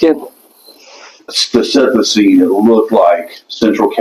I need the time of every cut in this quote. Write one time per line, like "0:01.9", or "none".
0:01.4

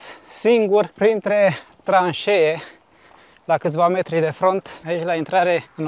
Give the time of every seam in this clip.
0:00.9
0:04.8

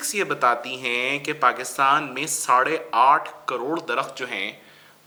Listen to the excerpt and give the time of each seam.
none

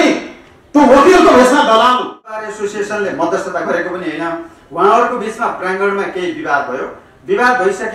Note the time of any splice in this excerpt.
0:02.5

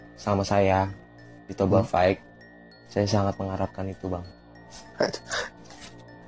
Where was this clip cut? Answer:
none

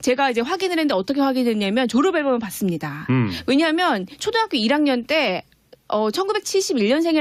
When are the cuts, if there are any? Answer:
none

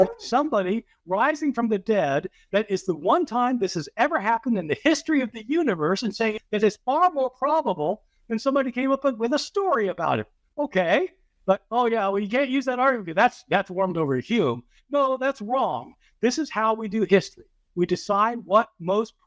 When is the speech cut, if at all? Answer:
0:06.1

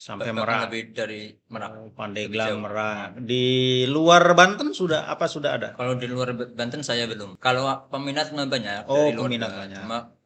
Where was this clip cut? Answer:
0:07.3

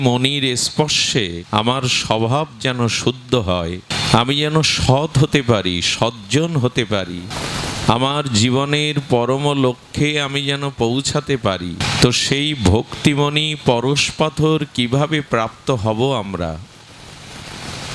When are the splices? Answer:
0:01.4
0:03.9
0:07.3
0:11.8

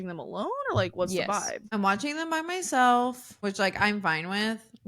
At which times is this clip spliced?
0:01.6
0:03.3

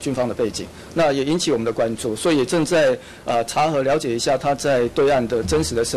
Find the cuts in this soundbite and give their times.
none

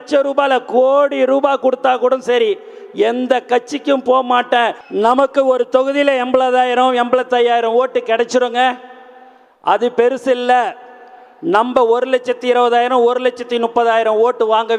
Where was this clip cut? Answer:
0:04.8

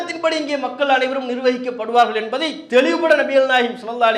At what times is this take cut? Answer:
none

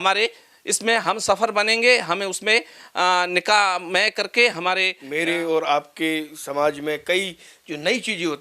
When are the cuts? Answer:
0:05.0

